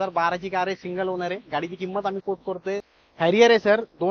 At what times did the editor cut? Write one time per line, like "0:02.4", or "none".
0:02.9